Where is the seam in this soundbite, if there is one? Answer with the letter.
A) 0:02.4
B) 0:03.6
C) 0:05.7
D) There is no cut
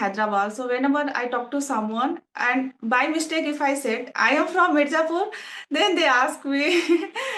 D